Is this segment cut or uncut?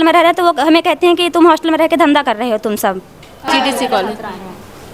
cut